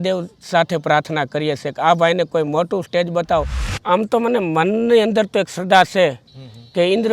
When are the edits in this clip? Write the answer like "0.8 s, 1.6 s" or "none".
3.8 s